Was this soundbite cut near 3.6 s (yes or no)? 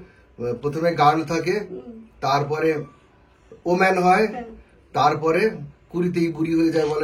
no